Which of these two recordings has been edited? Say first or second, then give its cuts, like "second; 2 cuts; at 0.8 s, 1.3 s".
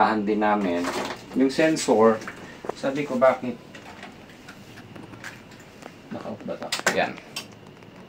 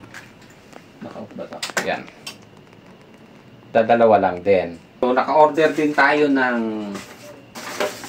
second; 1 cut; at 4.8 s